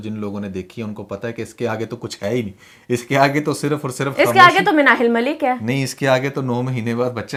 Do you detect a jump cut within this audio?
no; 0 cuts

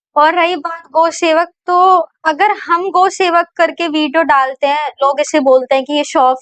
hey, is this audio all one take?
yes; 0 cuts

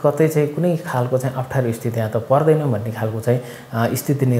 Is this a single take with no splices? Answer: yes; 0 cuts

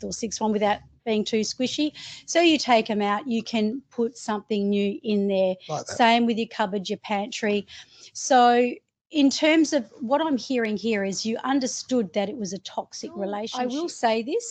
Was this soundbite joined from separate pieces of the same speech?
yes; 1 cut; at 13.5 s

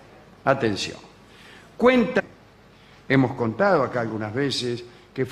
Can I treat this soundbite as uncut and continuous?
yes; 0 cuts

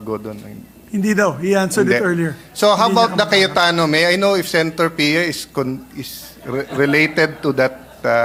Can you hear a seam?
no; 0 cuts

